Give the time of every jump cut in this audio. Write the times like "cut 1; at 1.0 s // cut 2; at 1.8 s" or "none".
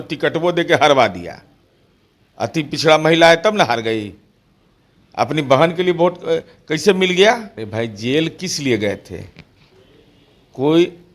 cut 1; at 7.6 s